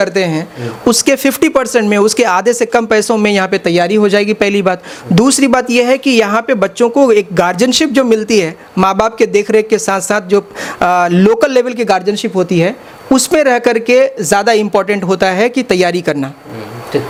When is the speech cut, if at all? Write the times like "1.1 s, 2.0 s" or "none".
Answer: none